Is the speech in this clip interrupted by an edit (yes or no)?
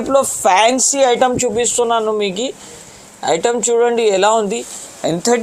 no